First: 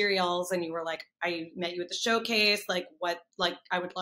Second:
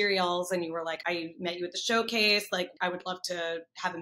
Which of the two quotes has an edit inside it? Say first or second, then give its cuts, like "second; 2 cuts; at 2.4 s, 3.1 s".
second; 2 cuts; at 1.0 s, 2.7 s